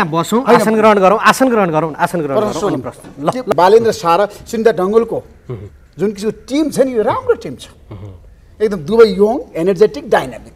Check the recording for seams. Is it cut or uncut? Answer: cut